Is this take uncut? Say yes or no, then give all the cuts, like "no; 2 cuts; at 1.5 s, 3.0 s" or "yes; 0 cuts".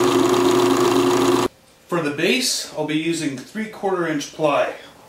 no; 1 cut; at 2.3 s